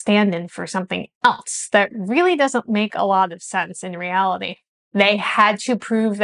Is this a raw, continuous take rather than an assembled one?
no; 1 cut; at 4.9 s

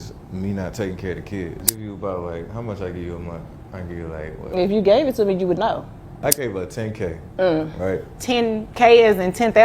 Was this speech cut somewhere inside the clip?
yes; 2 cuts; at 1.7 s, 6.2 s

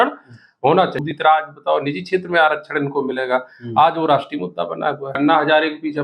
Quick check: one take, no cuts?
no; 2 cuts; at 0.9 s, 5.2 s

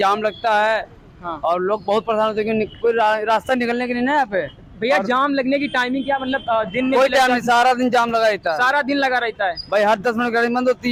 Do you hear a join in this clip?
no; 0 cuts

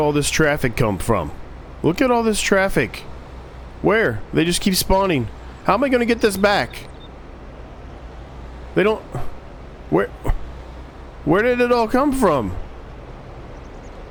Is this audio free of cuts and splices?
yes; 0 cuts

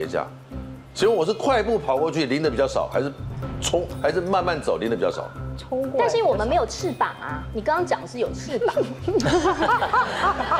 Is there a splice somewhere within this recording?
no; 0 cuts

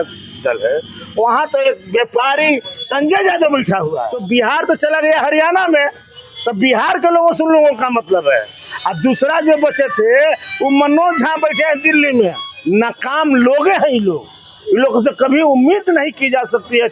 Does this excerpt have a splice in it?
yes; 2 cuts; at 4.1 s, 12.5 s

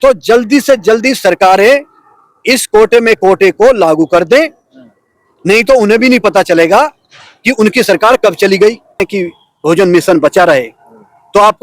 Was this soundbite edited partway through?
yes; 1 cut; at 9.1 s

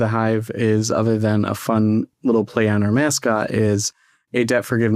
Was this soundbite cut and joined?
no; 0 cuts

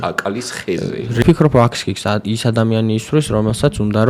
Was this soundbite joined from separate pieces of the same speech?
yes; 1 cut; at 1.2 s

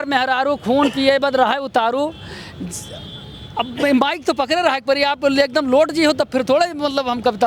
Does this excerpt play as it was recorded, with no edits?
yes; 0 cuts

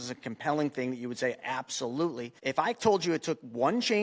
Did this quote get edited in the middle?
yes; 1 cut; at 2.3 s

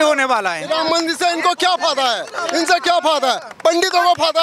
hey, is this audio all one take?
yes; 0 cuts

